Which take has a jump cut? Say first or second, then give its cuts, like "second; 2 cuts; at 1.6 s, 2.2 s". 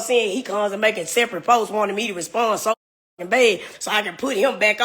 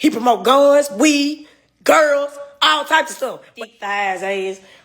second; 1 cut; at 3.5 s